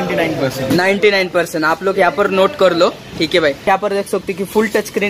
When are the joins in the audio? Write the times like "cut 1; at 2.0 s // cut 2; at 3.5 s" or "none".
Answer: cut 1; at 3.6 s

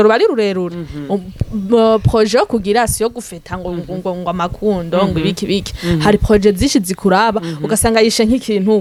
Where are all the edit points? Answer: none

